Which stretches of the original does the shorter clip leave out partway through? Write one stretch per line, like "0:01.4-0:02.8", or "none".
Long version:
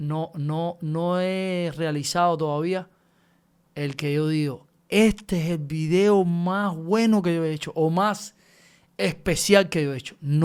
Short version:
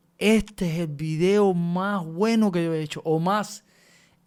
none